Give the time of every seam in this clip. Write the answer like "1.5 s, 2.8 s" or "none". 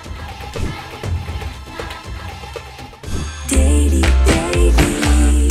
2.9 s